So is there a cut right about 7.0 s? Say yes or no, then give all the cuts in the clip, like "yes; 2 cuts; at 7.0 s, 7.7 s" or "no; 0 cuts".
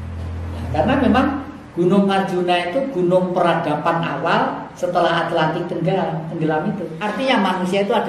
yes; 1 cut; at 7.0 s